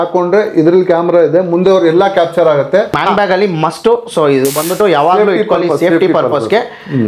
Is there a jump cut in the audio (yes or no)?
yes